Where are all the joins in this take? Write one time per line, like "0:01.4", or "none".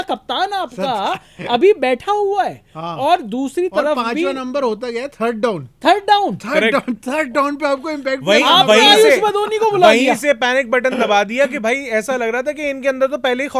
none